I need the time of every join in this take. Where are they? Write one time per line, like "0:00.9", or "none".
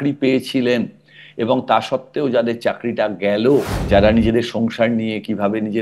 0:03.8